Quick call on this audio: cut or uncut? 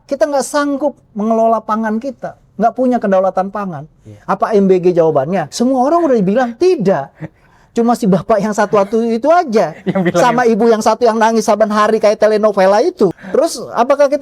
cut